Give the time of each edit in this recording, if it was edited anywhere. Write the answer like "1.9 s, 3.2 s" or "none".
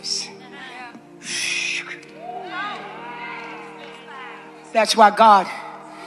3.0 s